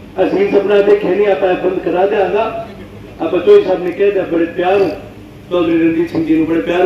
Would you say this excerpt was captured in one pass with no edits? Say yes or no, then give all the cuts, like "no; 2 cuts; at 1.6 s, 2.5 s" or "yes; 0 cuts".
yes; 0 cuts